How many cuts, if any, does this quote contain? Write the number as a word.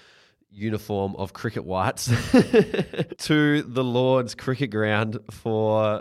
one